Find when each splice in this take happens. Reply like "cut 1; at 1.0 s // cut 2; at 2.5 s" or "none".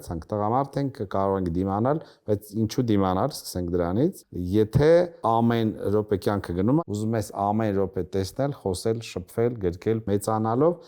cut 1; at 4.3 s // cut 2; at 5.2 s // cut 3; at 6.8 s // cut 4; at 10.0 s